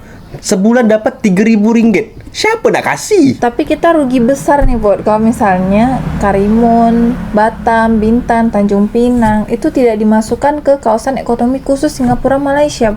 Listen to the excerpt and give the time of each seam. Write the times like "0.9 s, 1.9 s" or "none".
3.4 s